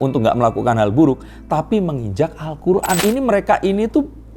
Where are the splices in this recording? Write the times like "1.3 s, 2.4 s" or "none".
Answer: 3.0 s